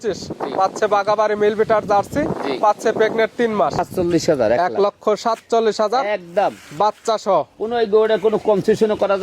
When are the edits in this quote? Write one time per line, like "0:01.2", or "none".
0:03.8